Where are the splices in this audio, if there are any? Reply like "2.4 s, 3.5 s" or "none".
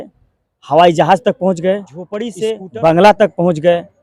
2.4 s